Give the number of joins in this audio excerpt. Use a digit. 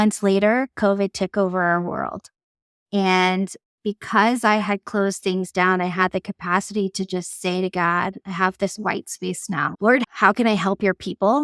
1